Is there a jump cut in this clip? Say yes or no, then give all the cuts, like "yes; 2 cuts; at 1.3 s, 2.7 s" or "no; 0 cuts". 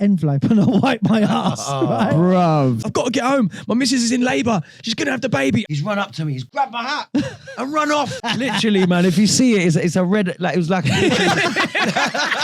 yes; 3 cuts; at 2.8 s, 5.7 s, 8.1 s